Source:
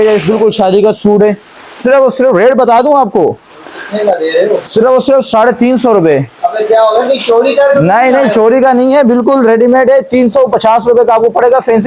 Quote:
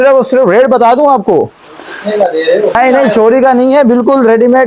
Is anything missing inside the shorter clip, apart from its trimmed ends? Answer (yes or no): yes